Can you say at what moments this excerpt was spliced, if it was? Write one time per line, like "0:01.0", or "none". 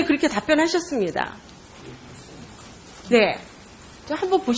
0:01.9

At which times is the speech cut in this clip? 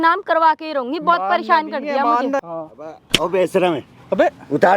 0:02.5

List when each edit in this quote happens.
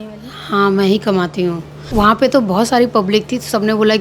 0:01.7

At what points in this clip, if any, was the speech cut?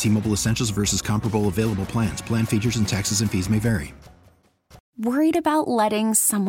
0:04.9

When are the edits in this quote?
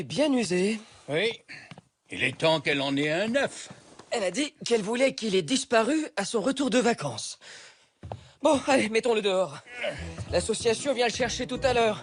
none

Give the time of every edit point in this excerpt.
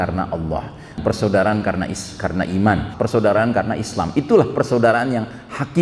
0:01.0
0:02.9

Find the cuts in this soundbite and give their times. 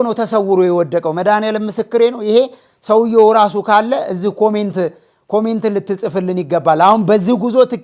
none

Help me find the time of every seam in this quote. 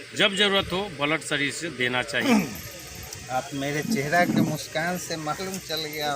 0:02.3

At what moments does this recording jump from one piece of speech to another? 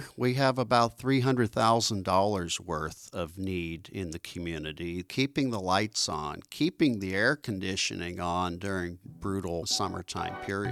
0:05.1
0:09.7

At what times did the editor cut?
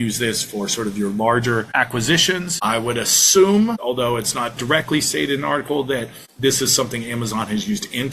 0:02.1
0:03.8
0:06.2

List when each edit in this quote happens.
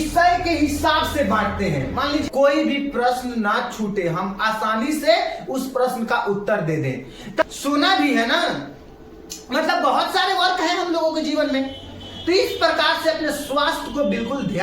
0:02.2
0:07.4

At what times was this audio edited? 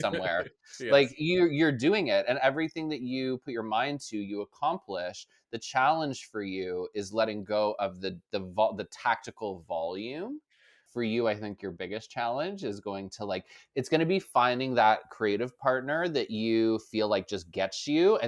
0:10.8

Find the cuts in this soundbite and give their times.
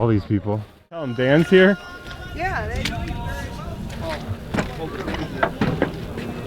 0:01.1

